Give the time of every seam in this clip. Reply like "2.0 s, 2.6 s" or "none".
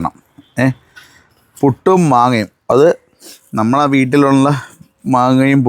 none